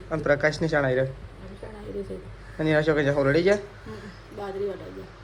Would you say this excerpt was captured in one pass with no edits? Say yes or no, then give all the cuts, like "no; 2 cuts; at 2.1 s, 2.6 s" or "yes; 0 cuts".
yes; 0 cuts